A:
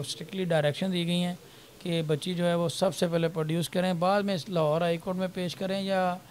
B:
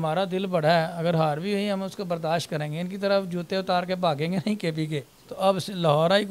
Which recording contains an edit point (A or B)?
B